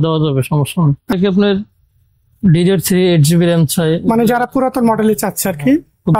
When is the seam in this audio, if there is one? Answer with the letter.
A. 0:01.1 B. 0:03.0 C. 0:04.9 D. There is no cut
A